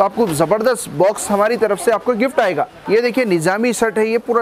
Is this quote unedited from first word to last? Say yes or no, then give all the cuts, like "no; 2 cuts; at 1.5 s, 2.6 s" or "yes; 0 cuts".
no; 1 cut; at 2.8 s